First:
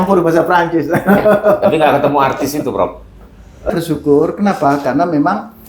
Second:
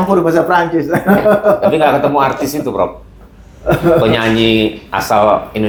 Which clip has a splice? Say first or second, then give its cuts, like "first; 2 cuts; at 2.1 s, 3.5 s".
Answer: first; 1 cut; at 3.7 s